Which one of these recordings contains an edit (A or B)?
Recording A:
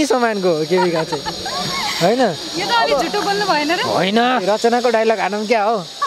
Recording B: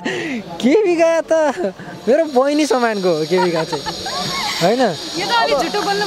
A